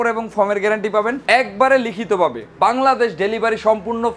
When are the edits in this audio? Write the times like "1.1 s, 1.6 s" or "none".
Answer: 2.5 s